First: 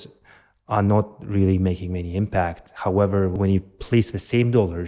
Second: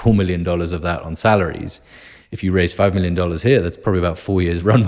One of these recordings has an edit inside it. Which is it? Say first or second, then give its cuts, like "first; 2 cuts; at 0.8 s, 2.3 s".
first; 1 cut; at 3.3 s